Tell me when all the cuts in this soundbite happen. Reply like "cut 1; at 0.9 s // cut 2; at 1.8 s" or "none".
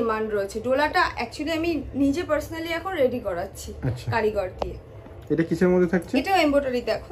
none